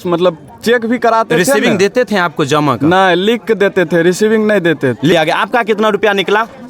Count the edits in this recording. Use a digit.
1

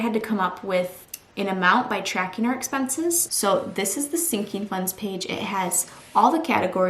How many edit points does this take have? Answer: 2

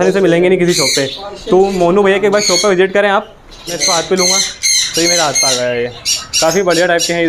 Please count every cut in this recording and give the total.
1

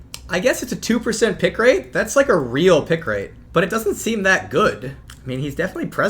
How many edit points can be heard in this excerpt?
2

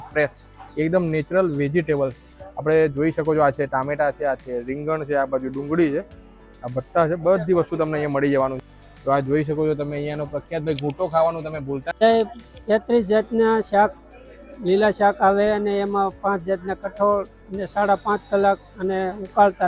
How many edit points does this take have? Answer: 2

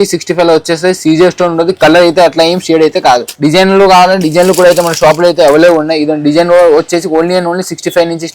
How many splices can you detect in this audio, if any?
1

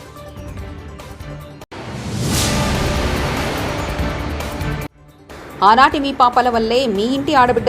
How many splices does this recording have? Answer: 1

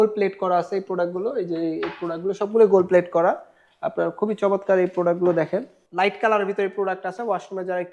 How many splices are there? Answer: 1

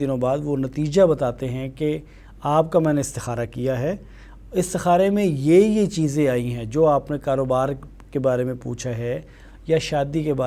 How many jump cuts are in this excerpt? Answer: 0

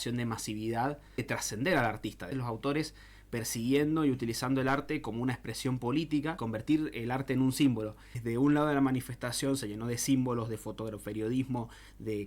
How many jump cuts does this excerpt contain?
4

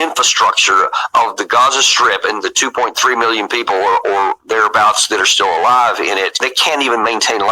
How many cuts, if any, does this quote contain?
1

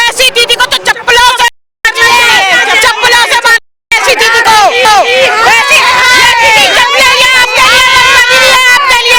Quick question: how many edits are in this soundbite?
0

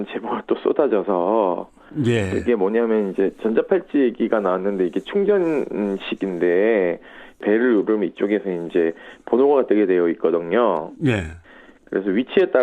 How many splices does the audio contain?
1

